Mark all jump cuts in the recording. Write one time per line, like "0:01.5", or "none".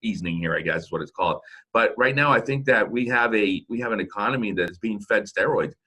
0:04.7